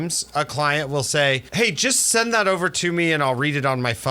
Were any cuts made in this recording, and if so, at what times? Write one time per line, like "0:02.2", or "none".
0:01.5

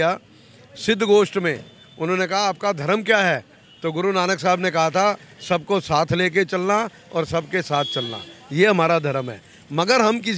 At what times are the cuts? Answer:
none

